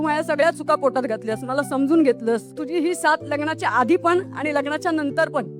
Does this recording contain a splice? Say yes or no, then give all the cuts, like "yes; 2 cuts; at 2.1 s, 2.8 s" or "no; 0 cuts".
yes; 1 cut; at 2.5 s